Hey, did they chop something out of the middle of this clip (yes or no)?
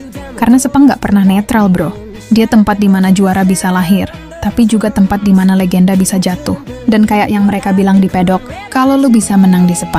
no